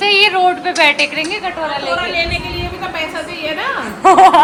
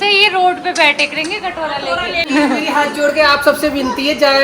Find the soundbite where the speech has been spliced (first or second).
second